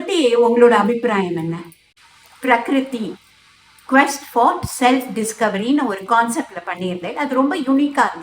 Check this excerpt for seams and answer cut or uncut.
cut